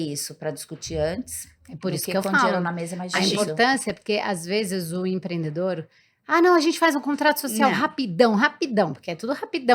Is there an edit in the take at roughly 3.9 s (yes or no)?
no